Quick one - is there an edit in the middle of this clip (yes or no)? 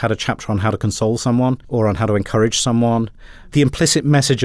yes